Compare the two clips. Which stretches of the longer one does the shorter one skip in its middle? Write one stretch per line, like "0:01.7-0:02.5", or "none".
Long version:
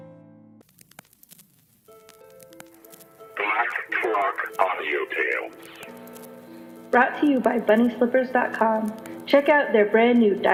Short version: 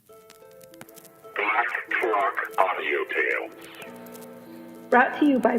0:03.1-0:03.3

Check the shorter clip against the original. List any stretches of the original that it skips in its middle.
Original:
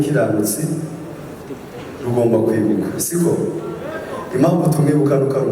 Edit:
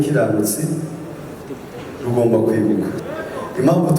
0:03.0-0:03.8

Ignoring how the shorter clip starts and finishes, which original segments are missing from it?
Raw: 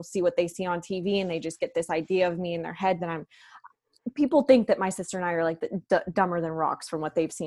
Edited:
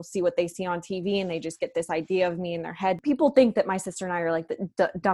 0:03.0-0:04.1

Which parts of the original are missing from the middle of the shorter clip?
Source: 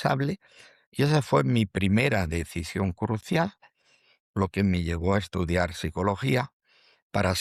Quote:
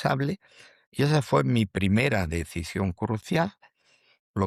none

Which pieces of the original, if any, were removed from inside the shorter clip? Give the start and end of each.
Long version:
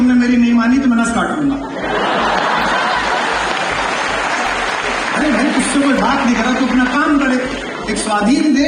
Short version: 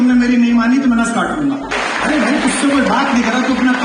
0:01.7-0:04.8

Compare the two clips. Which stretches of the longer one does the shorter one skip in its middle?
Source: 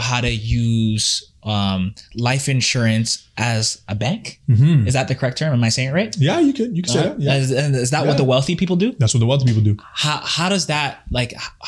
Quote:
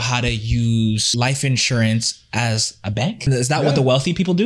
0:01.1-0:02.1
0:04.3-0:07.7

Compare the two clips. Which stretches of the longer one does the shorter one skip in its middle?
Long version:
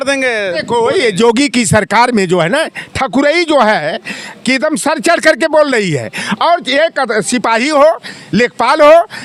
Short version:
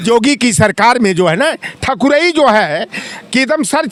none

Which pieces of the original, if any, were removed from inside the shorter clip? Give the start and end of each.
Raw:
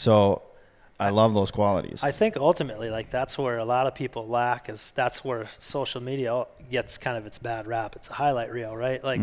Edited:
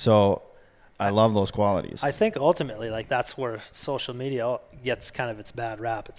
0:03.0-0:04.9

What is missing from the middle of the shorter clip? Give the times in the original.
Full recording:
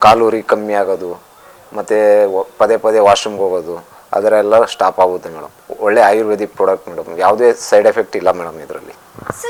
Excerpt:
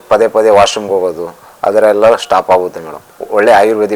none

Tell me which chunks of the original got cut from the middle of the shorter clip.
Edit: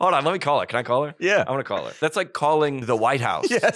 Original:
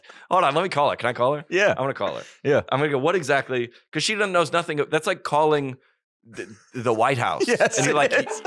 0:02.3-0:04.9
0:05.7-0:06.8

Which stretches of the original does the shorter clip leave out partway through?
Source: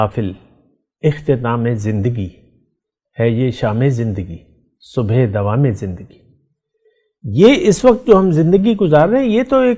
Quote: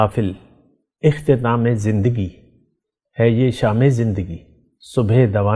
none

